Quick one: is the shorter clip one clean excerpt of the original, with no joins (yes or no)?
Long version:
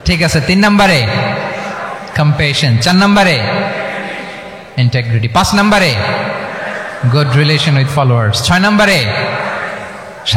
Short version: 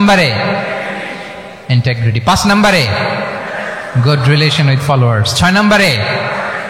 yes